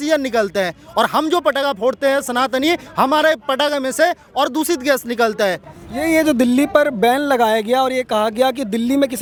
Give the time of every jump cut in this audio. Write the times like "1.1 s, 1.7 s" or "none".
none